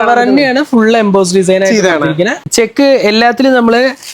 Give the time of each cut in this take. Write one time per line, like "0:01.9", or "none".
0:02.5